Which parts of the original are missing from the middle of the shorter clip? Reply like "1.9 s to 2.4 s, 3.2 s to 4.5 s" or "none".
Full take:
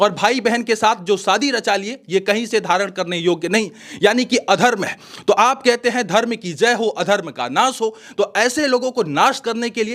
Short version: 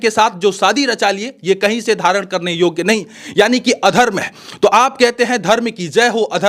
none